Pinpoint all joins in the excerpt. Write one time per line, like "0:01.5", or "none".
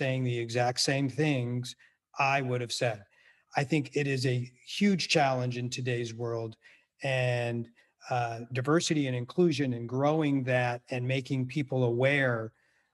none